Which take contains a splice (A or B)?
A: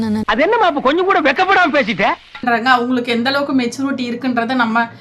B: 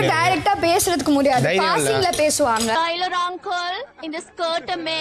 A